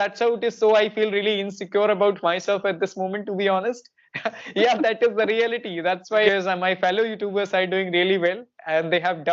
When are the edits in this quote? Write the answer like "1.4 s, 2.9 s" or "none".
6.3 s